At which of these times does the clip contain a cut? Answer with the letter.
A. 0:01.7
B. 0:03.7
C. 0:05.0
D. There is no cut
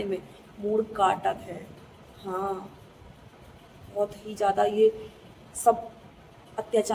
D